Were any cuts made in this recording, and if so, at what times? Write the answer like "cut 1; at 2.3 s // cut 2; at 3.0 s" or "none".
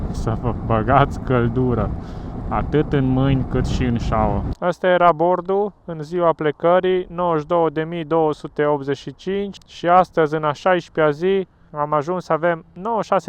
cut 1; at 4.5 s // cut 2; at 9.5 s // cut 3; at 11.6 s